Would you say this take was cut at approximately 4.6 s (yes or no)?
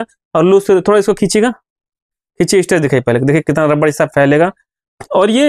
no